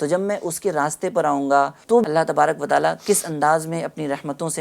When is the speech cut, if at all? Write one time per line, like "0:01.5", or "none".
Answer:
0:02.0